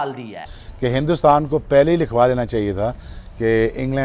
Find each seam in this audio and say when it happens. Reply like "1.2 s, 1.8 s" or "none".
1.0 s